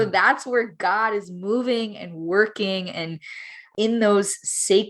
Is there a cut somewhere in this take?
yes; 1 cut; at 3.6 s

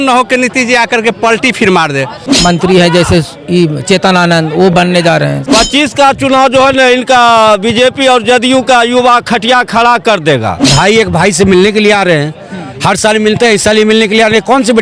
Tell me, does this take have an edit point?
yes; 3 cuts; at 2.3 s, 5.4 s, 10.6 s

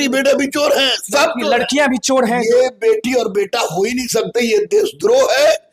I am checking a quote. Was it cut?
no; 0 cuts

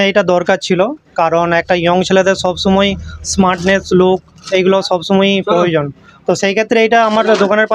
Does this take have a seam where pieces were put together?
no; 0 cuts

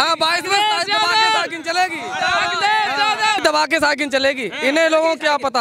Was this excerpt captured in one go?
yes; 0 cuts

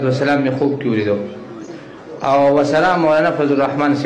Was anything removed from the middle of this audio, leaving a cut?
no; 0 cuts

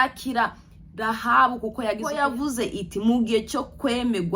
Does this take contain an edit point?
yes; 1 cut; at 2.1 s

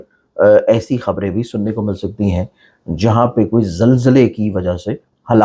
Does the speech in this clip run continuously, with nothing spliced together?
yes; 0 cuts

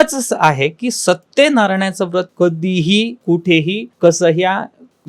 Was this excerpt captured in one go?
no; 2 cuts; at 2.3 s, 3.4 s

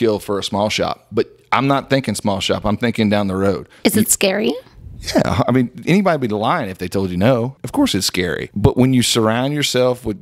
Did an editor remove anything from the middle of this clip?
yes; 3 cuts; at 3.7 s, 7.6 s, 8.4 s

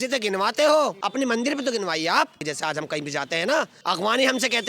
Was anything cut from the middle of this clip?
yes; 3 cuts; at 1.0 s, 2.5 s, 3.8 s

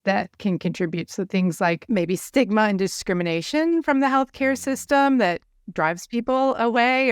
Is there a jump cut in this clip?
yes; 1 cut; at 1.8 s

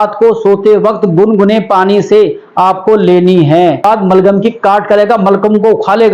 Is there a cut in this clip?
yes; 1 cut; at 3.8 s

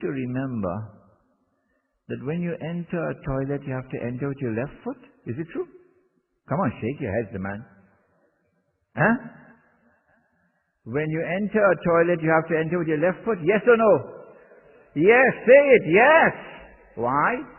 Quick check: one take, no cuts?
no; 1 cut; at 1.8 s

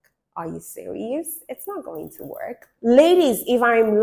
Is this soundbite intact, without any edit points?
no; 1 cut; at 2.7 s

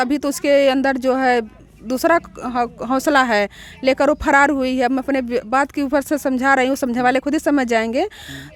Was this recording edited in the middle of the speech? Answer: no; 0 cuts

